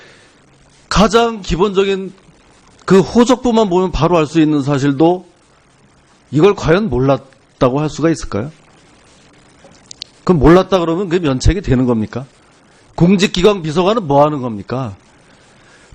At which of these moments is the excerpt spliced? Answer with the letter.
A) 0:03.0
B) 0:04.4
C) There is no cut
A